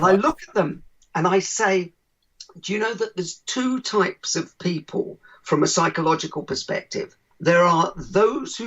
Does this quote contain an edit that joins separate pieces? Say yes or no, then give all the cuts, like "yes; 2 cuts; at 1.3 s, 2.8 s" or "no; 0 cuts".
yes; 1 cut; at 7.2 s